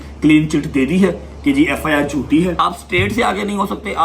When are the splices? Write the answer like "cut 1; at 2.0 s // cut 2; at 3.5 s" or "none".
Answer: cut 1; at 2.6 s